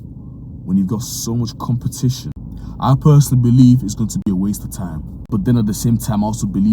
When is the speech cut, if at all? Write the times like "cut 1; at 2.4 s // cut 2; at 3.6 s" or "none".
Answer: cut 1; at 2.3 s // cut 2; at 5.1 s